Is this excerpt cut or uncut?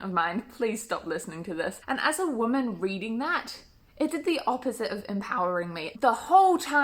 cut